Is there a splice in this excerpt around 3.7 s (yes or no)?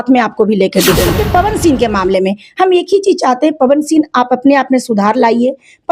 no